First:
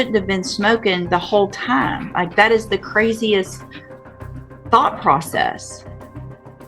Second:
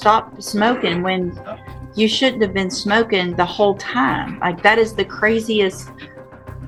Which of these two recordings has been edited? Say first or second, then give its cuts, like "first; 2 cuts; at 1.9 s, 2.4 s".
first; 1 cut; at 5.6 s